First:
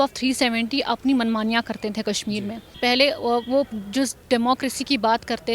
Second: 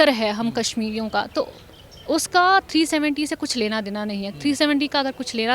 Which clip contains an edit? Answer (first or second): first